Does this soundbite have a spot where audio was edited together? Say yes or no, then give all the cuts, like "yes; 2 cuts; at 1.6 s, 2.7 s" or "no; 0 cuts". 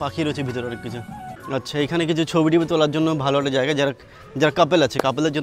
yes; 1 cut; at 1.3 s